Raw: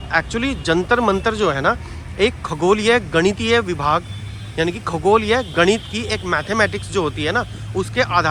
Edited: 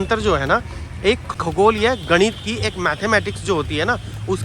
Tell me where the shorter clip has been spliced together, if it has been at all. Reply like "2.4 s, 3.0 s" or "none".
1.3 s